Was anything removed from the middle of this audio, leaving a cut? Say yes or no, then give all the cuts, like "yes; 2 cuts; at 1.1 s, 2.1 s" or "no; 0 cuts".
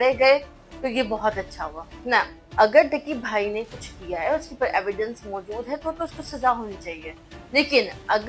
yes; 1 cut; at 2.4 s